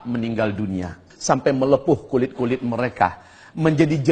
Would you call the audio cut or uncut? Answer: cut